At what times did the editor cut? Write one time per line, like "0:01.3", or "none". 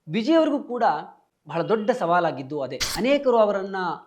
0:02.8